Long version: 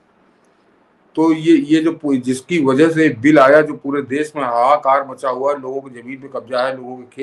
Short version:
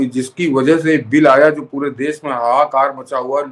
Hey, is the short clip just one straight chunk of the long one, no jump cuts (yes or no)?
yes